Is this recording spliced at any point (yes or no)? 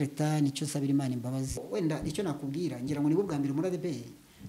yes